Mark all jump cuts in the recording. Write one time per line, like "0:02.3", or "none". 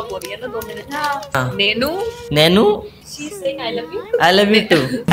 0:01.4